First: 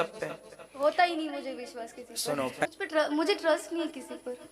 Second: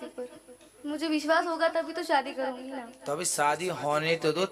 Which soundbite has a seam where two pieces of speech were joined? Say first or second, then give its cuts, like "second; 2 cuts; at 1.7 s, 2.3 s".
first; 1 cut; at 2.7 s